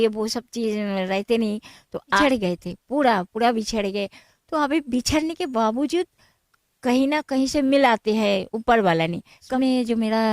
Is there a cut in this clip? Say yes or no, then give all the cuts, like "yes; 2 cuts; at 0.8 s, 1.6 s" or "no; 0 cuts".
yes; 2 cuts; at 2.2 s, 9.4 s